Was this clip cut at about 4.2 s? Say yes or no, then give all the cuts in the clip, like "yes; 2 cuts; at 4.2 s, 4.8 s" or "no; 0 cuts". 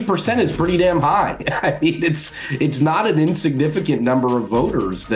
no; 0 cuts